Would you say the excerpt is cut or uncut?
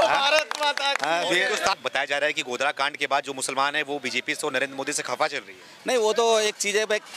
cut